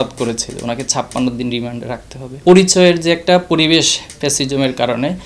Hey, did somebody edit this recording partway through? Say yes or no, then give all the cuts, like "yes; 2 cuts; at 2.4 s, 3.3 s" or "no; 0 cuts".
yes; 1 cut; at 2.4 s